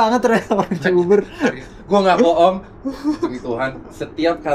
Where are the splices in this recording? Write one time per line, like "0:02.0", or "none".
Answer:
none